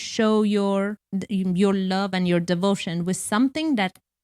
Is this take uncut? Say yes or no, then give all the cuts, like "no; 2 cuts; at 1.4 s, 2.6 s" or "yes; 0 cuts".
no; 1 cut; at 1.0 s